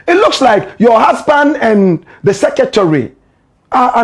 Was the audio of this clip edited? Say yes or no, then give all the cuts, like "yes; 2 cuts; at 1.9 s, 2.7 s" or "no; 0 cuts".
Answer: no; 0 cuts